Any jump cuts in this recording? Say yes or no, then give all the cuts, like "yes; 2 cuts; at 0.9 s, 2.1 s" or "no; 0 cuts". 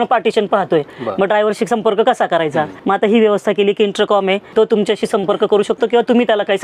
no; 0 cuts